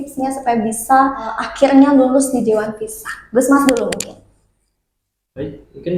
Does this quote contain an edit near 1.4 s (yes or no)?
yes